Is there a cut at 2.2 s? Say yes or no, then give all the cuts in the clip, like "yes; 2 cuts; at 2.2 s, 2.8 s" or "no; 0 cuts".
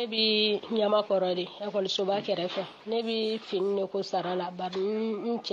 no; 0 cuts